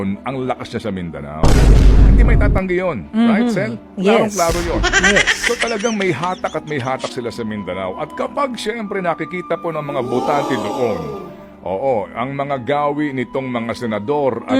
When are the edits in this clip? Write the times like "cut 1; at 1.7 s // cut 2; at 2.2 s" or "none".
none